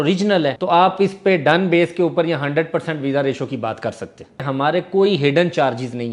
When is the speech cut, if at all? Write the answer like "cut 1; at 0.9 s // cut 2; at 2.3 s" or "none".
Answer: cut 1; at 4.5 s